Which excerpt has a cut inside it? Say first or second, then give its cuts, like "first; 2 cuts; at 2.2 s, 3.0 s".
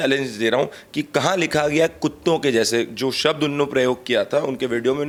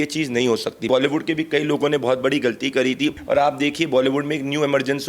second; 2 cuts; at 0.9 s, 3.2 s